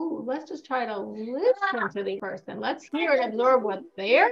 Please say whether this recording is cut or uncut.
cut